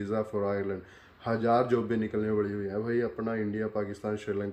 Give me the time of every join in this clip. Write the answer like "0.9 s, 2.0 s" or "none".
none